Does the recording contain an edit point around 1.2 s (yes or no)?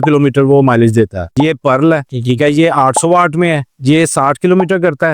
yes